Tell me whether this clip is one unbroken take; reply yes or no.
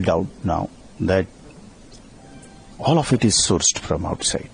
yes